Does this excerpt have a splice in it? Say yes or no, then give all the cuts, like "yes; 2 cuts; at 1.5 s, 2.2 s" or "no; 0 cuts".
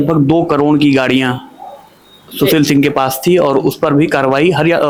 no; 0 cuts